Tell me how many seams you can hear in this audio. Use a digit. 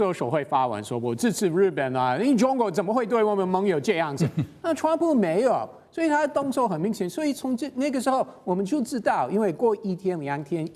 0